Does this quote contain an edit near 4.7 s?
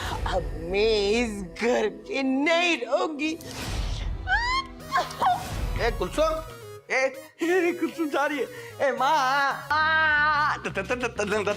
no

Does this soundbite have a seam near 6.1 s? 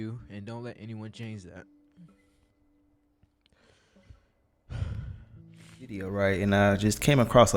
yes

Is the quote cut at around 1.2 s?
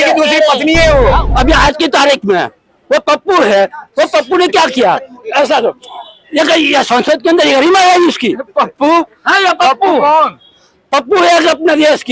yes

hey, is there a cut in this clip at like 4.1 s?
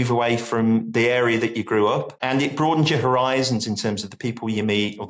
no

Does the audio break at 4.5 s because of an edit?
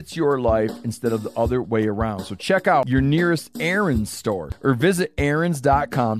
yes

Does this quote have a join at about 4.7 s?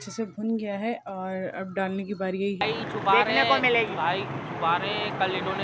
no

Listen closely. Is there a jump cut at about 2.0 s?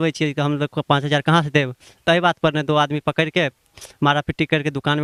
no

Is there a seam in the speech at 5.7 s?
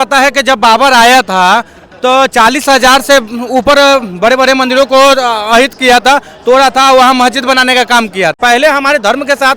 no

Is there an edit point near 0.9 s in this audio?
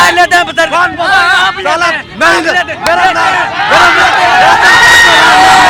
no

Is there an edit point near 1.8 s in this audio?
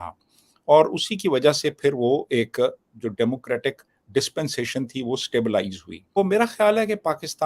no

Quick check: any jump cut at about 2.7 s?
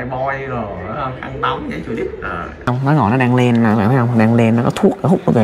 yes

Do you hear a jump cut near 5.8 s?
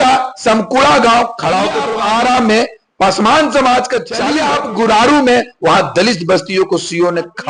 no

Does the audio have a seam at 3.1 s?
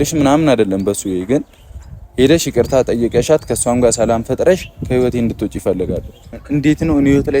no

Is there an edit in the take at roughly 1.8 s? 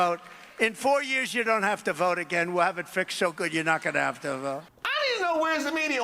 no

